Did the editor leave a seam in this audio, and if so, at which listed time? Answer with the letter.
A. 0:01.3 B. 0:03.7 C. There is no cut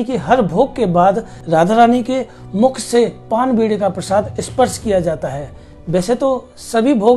A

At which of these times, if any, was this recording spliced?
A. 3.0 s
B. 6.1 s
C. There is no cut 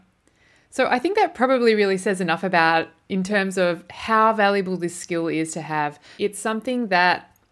B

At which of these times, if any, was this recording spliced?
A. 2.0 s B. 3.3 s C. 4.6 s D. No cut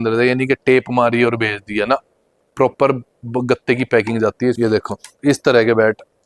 C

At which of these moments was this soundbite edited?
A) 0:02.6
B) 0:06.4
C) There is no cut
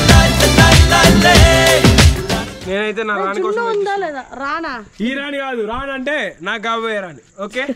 A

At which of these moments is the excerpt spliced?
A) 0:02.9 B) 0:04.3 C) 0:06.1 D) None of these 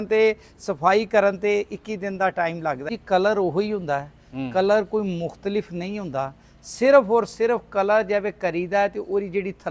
A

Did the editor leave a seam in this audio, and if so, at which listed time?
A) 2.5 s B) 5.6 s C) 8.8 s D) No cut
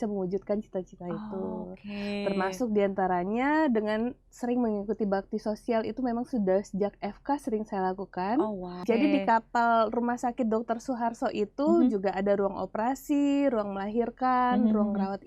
C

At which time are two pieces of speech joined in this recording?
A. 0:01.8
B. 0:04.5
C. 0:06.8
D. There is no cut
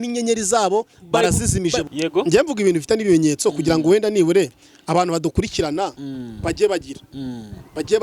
A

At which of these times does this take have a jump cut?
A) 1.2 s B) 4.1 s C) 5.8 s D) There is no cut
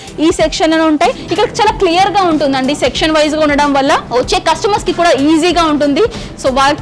A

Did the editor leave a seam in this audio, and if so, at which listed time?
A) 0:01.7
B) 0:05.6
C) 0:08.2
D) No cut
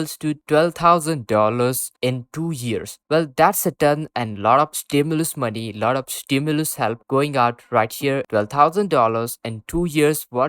C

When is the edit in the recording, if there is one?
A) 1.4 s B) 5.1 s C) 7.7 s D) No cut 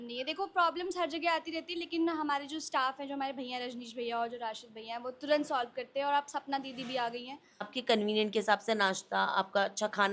C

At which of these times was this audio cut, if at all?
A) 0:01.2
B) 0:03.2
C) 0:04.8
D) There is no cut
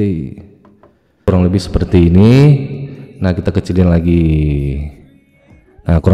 A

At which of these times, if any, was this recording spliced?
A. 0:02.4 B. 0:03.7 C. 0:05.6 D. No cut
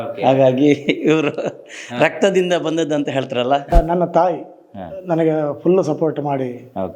B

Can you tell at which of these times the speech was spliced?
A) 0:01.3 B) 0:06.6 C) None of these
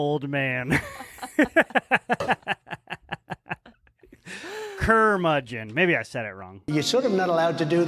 B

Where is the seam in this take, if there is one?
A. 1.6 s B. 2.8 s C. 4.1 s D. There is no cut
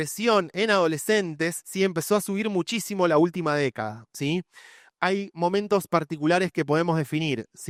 D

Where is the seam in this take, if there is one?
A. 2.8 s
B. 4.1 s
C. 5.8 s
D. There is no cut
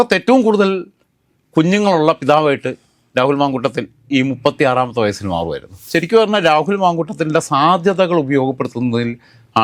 C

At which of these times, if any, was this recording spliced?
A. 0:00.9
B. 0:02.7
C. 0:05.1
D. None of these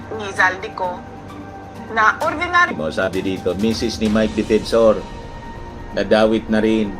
B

